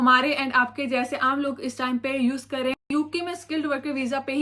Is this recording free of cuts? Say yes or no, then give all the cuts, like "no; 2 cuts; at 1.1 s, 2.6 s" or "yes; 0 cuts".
no; 1 cut; at 2.8 s